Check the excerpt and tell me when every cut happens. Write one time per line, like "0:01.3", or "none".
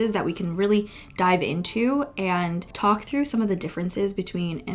0:02.6